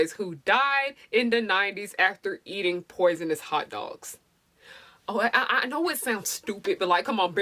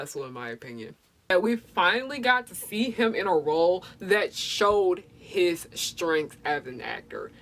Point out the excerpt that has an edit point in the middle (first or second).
second